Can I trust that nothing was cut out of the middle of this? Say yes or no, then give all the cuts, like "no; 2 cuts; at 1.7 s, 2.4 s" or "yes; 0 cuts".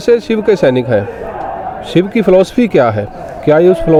yes; 0 cuts